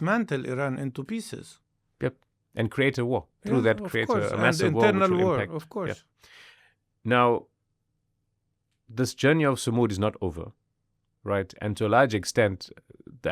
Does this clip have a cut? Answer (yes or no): no